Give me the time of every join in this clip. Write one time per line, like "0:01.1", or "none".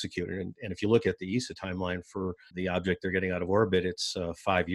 0:02.5